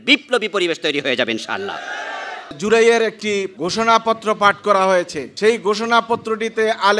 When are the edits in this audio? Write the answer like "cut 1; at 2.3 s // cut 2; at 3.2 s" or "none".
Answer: cut 1; at 2.6 s // cut 2; at 3.6 s // cut 3; at 5.2 s